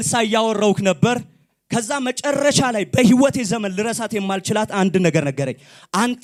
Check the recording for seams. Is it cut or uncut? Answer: uncut